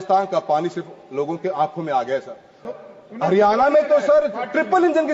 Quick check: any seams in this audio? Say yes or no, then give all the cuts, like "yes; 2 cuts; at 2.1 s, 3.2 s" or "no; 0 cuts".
yes; 1 cut; at 2.6 s